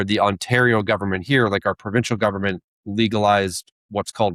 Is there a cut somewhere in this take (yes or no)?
no